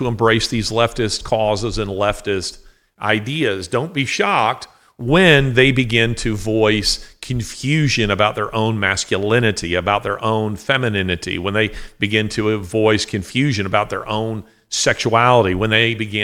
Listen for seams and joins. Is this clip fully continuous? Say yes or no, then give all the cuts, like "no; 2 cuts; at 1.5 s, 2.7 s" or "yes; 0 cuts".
yes; 0 cuts